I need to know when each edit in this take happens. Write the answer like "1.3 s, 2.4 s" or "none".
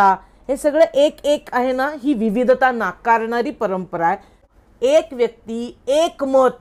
4.4 s